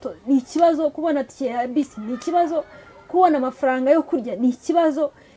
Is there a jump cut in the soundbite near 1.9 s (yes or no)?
no